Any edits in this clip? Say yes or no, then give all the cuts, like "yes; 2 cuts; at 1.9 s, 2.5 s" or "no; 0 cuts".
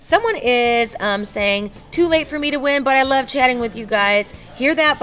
no; 0 cuts